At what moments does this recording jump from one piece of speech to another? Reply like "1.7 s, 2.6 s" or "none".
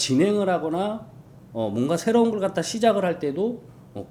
none